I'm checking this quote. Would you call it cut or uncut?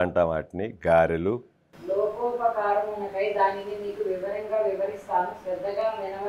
cut